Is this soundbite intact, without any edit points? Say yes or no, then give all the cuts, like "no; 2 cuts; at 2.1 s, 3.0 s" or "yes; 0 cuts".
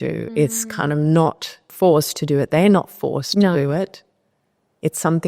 no; 1 cut; at 1.7 s